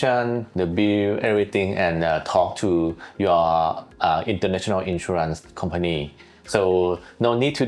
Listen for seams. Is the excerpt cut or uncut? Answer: uncut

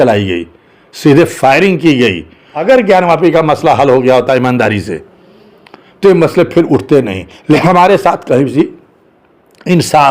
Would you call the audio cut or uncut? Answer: cut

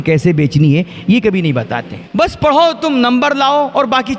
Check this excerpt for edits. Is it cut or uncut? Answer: cut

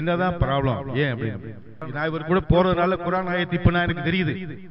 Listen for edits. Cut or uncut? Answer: cut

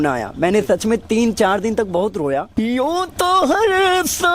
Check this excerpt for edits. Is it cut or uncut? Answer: cut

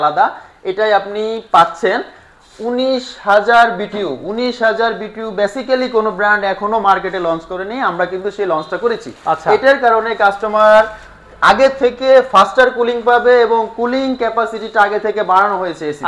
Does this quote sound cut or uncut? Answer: uncut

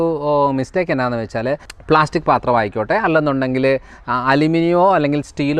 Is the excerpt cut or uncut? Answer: cut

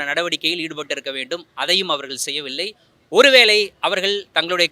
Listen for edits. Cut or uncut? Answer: uncut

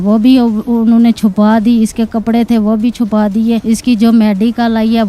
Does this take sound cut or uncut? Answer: cut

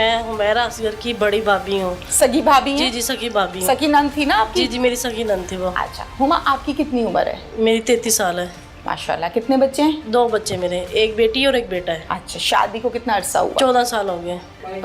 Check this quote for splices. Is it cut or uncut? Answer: uncut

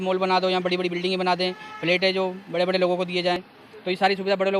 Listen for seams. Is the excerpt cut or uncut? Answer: cut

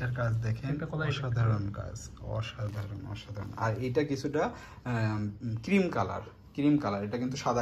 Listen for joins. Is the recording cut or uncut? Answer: uncut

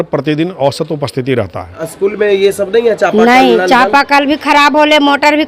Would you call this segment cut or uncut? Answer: cut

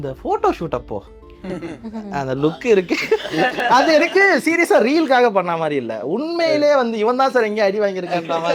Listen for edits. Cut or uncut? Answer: uncut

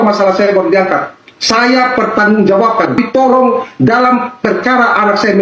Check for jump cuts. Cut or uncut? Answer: cut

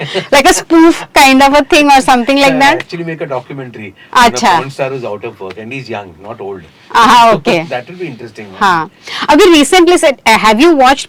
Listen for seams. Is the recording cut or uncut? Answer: uncut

